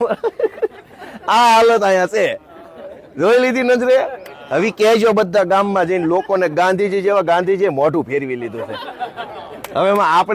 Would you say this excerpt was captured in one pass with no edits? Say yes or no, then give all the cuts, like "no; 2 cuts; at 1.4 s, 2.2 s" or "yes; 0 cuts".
yes; 0 cuts